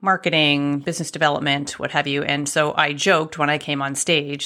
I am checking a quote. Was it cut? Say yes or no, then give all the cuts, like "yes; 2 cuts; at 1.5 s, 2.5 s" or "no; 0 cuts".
no; 0 cuts